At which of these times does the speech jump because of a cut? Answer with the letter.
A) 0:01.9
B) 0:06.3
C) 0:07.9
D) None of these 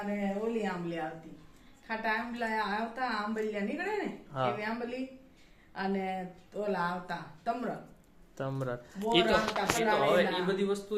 D